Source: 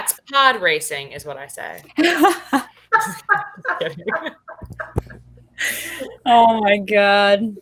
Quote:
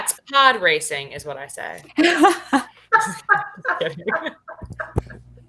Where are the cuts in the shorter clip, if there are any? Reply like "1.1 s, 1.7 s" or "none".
none